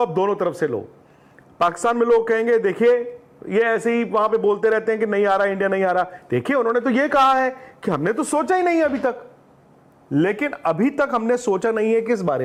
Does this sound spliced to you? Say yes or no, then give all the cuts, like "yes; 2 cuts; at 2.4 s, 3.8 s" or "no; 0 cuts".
no; 0 cuts